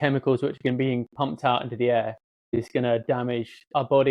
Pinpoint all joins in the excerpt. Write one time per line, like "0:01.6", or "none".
0:02.6